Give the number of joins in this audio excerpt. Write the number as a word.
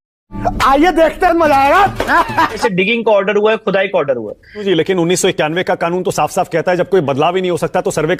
two